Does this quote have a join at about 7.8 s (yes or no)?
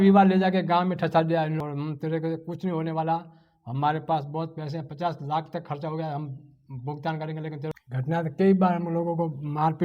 yes